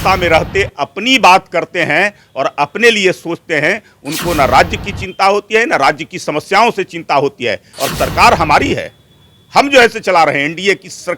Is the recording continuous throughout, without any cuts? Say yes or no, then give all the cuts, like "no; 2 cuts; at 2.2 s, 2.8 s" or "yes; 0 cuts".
no; 1 cut; at 7.8 s